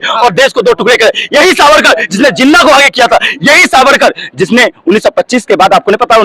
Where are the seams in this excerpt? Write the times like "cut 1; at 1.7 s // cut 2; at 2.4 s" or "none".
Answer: none